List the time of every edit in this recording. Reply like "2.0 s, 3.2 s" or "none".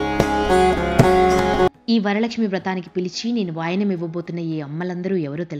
1.7 s